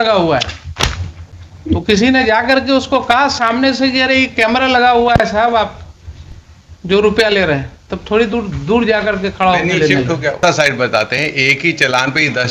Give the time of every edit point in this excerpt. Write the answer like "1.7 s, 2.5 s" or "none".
10.4 s